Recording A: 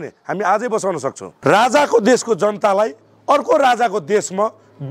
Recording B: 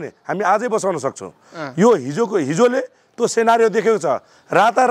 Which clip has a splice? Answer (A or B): A